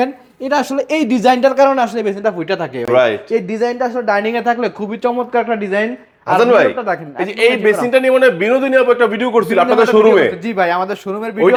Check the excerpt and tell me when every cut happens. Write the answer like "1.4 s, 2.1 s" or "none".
none